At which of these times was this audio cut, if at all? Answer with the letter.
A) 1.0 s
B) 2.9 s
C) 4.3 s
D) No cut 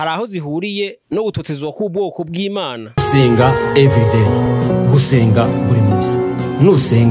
B